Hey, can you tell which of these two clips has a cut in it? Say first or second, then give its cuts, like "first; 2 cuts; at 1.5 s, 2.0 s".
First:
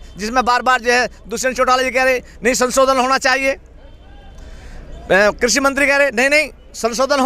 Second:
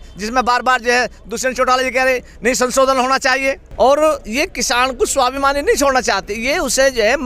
second; 1 cut; at 3.6 s